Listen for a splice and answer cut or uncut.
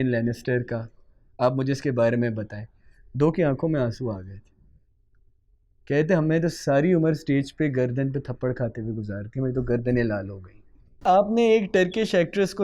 cut